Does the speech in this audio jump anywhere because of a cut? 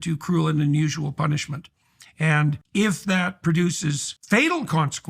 yes; 2 cuts; at 2.6 s, 4.1 s

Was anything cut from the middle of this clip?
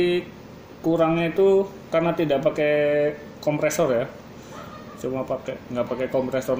no; 0 cuts

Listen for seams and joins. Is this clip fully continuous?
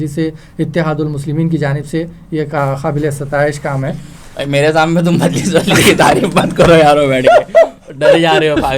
yes; 0 cuts

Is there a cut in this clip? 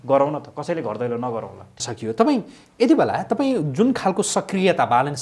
yes; 1 cut; at 1.8 s

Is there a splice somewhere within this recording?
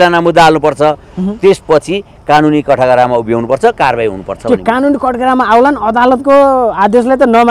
no; 0 cuts

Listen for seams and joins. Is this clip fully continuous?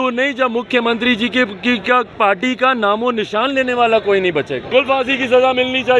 no; 1 cut; at 4.7 s

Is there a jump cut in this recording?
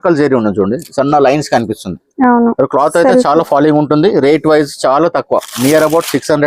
no; 0 cuts

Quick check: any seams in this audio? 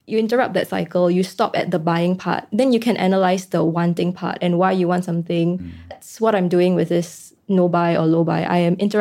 yes; 1 cut; at 6.0 s

